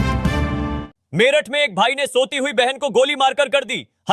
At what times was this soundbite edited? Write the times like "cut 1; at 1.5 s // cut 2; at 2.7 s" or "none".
cut 1; at 0.9 s

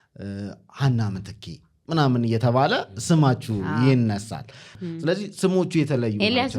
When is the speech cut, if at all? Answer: cut 1; at 4.7 s

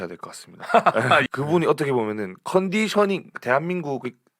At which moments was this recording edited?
cut 1; at 1.2 s

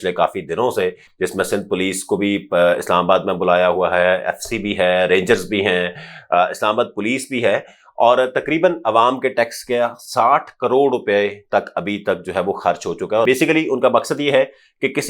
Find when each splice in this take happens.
cut 1; at 13.2 s

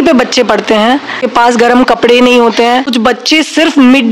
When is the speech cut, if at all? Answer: cut 1; at 1.3 s // cut 2; at 2.9 s

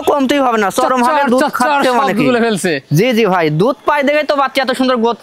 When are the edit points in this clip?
none

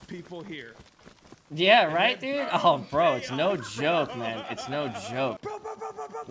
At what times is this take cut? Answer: cut 1; at 5.4 s

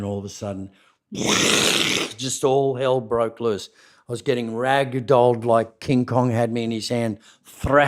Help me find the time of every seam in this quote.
cut 1; at 5.8 s

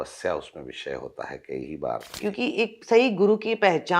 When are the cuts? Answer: cut 1; at 2.1 s

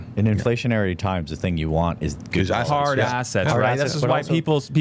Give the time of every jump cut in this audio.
none

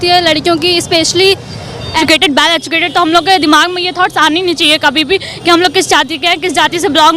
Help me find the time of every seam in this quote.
cut 1; at 2.0 s

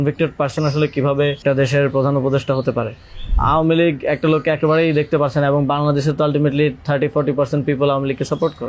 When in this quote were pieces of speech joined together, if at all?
cut 1; at 1.4 s // cut 2; at 3.3 s

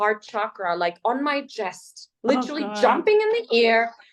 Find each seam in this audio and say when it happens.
none

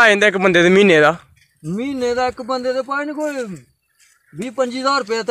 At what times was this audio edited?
none

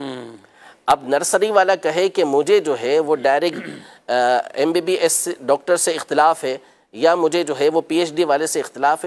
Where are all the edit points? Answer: none

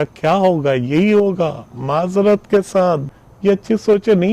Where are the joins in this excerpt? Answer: cut 1; at 3.1 s

